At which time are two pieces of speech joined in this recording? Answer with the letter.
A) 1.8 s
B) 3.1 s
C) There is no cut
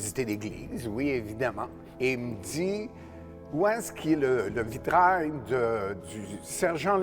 A